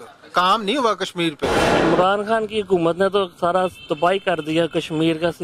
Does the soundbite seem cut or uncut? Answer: cut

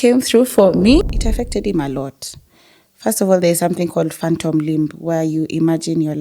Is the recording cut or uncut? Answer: cut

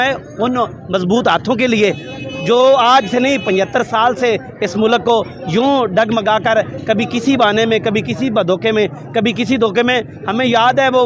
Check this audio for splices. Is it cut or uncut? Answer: uncut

